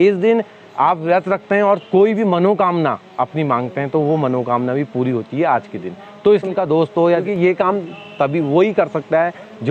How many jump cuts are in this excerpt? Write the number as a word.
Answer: one